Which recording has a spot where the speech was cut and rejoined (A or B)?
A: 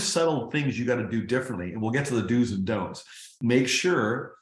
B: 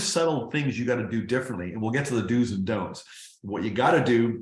A